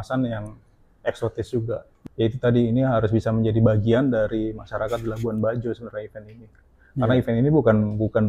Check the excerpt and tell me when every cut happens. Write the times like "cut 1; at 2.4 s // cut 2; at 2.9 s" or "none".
cut 1; at 1.9 s